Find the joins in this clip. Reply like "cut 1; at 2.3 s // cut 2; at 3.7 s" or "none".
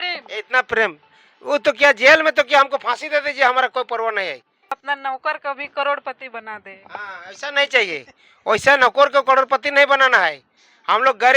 cut 1; at 4.9 s